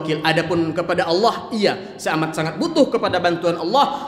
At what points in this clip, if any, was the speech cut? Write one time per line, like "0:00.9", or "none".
none